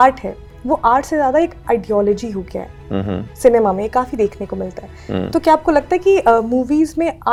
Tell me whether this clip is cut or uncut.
uncut